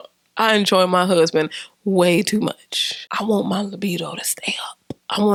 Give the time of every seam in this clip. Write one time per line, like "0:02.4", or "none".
none